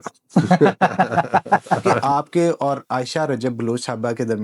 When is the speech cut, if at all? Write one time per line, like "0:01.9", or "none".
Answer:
0:02.0